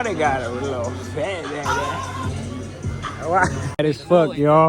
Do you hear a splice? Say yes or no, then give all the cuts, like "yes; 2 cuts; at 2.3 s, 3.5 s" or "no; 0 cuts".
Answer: yes; 1 cut; at 3.7 s